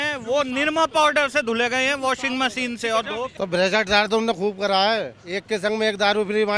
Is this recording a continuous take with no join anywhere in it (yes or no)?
no